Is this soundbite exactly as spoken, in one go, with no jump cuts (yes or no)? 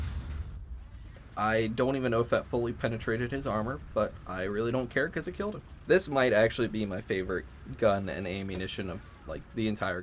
no